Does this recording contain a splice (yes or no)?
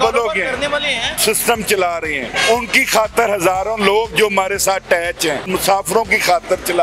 yes